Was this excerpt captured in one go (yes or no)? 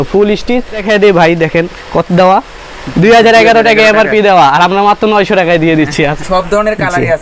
no